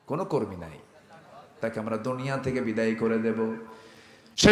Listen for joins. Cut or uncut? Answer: cut